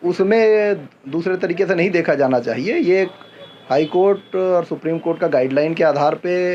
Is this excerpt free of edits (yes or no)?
yes